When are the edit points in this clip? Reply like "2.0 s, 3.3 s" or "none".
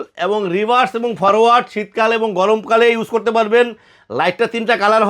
none